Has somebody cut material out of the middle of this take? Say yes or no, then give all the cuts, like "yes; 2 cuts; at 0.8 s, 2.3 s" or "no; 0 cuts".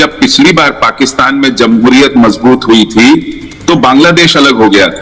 no; 0 cuts